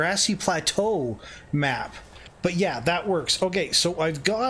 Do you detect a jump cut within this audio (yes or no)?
yes